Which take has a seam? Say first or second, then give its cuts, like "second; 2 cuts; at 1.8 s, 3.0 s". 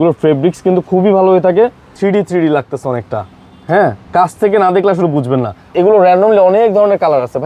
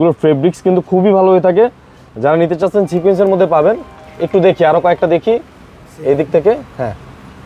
first; 2 cuts; at 1.9 s, 5.6 s